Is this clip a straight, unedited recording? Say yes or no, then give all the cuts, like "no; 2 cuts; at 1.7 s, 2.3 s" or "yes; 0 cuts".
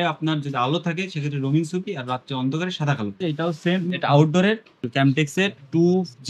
no; 2 cuts; at 3.2 s, 4.7 s